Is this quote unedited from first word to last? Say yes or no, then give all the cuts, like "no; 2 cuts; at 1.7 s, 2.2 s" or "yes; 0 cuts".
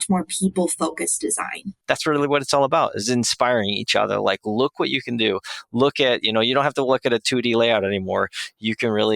no; 1 cut; at 1.7 s